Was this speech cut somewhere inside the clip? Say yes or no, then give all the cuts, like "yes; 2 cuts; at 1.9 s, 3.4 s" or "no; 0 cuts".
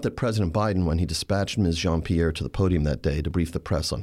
no; 0 cuts